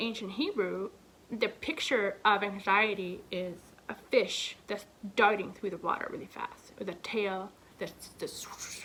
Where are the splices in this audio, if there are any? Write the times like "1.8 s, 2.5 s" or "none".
none